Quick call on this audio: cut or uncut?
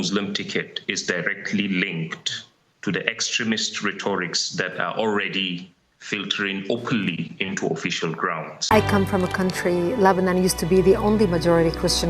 cut